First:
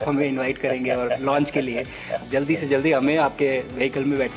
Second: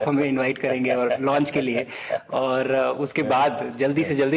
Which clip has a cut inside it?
first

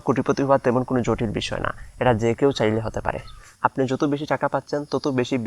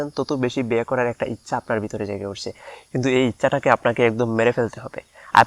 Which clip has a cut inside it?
first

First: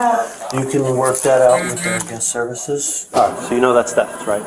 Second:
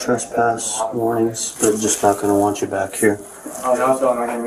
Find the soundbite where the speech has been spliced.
first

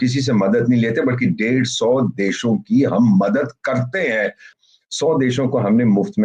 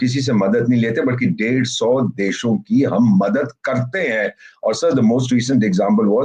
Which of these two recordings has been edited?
first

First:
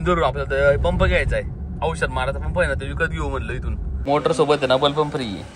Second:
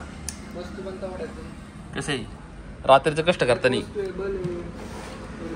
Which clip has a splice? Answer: first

